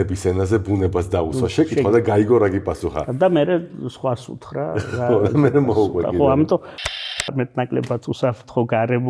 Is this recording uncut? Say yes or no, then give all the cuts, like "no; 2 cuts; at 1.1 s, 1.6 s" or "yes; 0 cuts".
no; 1 cut; at 6.9 s